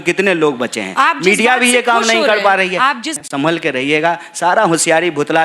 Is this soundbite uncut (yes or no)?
no